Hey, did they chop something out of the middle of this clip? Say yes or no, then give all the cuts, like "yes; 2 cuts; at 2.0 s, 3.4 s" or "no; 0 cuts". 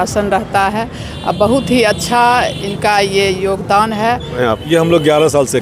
yes; 1 cut; at 4.4 s